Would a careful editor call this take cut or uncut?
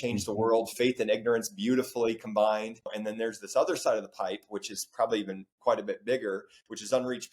cut